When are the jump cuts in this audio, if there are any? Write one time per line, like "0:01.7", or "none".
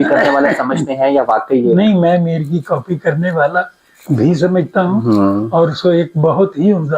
none